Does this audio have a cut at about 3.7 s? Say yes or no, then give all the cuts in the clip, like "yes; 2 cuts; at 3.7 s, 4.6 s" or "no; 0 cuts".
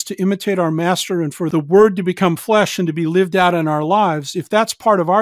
no; 1 cut; at 1.5 s